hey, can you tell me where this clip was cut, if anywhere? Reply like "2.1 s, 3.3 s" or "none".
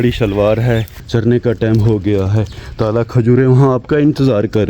1.0 s